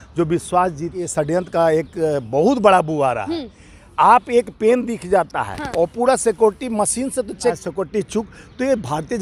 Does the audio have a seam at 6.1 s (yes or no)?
no